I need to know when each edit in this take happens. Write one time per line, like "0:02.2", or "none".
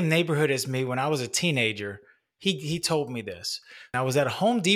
0:03.9